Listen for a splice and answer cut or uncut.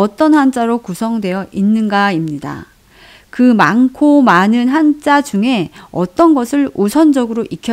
uncut